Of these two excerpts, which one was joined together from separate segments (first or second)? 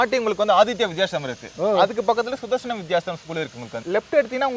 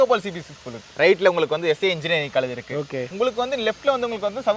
second